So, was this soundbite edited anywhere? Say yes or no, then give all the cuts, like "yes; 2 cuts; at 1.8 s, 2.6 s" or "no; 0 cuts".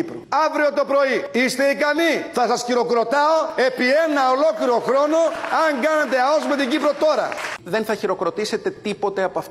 yes; 1 cut; at 7.6 s